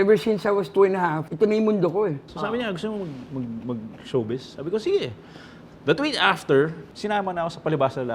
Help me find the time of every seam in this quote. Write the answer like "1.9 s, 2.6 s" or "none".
1.2 s, 2.3 s, 6.9 s

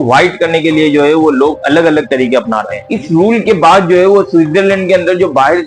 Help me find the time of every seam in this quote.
2.8 s

